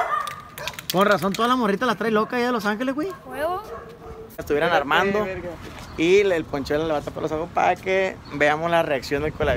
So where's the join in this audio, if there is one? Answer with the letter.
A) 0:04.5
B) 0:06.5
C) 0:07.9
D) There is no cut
A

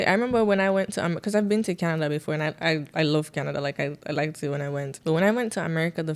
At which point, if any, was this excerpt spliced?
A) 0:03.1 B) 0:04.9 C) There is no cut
B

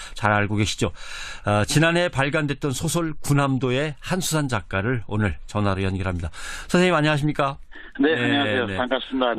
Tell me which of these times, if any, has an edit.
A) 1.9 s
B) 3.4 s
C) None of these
B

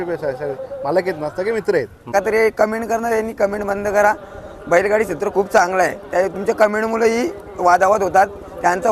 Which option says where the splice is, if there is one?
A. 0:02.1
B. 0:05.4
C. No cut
A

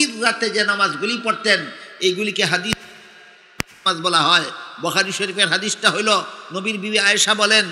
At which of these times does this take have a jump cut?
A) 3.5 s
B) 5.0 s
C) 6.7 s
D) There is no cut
D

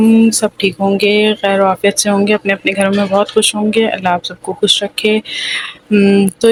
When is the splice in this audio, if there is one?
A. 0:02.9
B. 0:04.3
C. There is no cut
C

